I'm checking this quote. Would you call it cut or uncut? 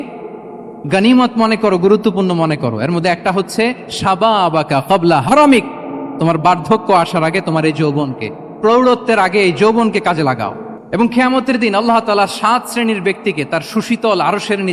uncut